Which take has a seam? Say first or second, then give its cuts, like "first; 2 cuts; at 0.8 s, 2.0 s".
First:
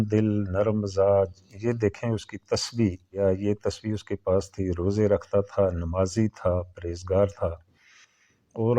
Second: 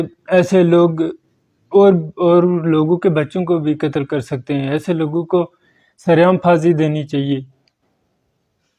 first; 1 cut; at 3.1 s